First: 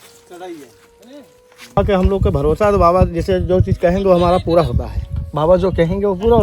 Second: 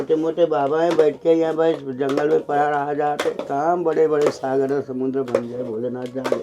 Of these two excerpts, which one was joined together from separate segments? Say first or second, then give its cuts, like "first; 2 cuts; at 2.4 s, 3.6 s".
first; 1 cut; at 1.8 s